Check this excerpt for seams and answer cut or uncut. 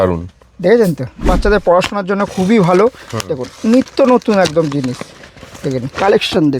cut